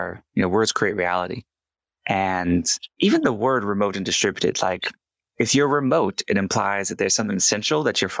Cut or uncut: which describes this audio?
cut